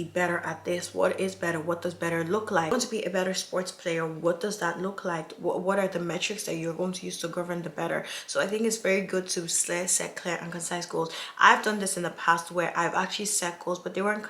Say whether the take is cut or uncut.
uncut